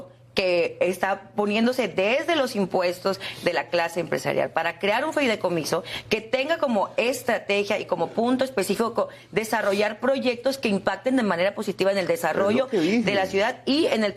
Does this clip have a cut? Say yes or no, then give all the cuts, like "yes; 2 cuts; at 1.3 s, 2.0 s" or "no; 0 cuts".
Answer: no; 0 cuts